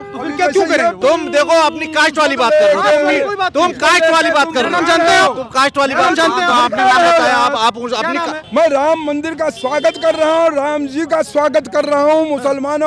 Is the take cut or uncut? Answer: cut